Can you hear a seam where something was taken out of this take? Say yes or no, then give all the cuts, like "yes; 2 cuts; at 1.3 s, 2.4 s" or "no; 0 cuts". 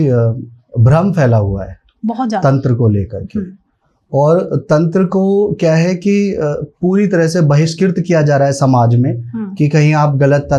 no; 0 cuts